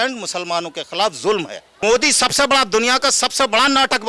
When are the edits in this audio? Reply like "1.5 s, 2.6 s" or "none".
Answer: 1.6 s

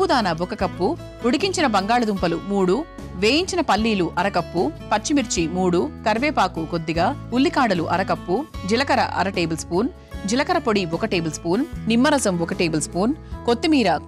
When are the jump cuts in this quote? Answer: none

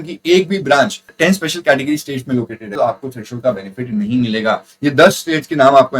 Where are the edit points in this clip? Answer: 1.1 s, 2.6 s, 4.7 s

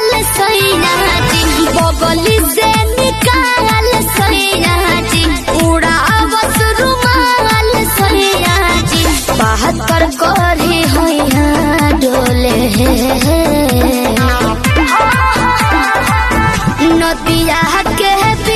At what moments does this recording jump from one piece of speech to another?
none

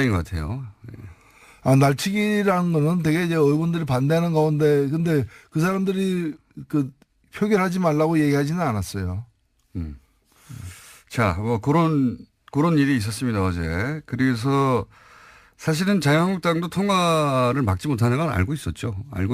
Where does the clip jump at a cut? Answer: 10.2 s

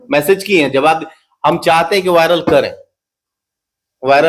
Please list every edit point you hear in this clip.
none

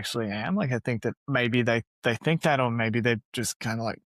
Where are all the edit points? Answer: 1.2 s

